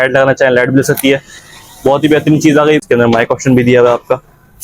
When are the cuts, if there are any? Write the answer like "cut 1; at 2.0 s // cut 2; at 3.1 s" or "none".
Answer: cut 1; at 2.8 s